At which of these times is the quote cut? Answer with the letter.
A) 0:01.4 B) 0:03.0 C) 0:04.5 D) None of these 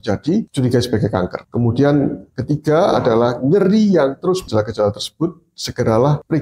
C